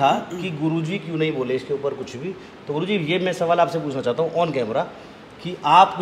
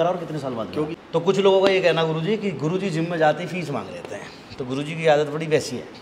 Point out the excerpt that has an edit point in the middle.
second; 1 cut; at 0.9 s

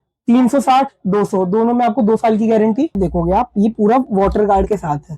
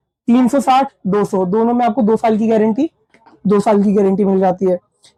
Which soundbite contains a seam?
first; 1 cut; at 3.0 s

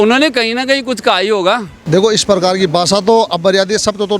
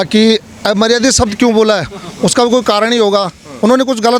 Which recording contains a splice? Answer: first; 1 cut; at 1.7 s

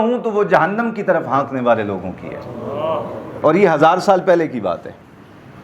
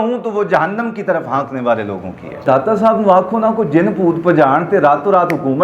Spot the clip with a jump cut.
second; 1 cut; at 2.4 s

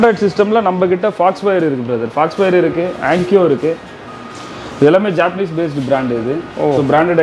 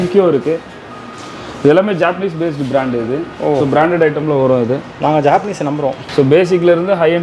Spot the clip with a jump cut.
second; 1 cut; at 6.0 s

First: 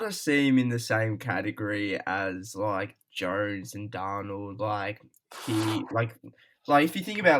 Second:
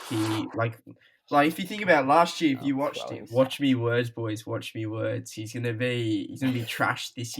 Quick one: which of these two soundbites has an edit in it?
second; 1 cut; at 3.0 s

